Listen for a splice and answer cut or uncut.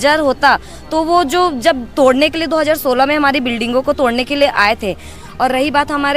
cut